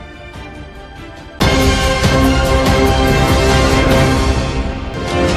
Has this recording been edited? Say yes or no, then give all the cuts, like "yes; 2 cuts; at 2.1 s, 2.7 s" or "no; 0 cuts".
no; 0 cuts